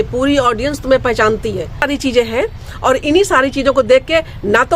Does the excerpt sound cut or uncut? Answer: cut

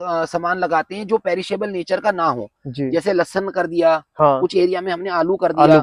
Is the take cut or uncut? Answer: uncut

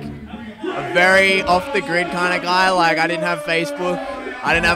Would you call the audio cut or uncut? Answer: uncut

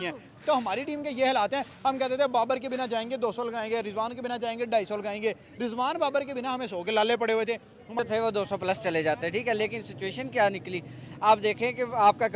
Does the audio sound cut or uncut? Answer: cut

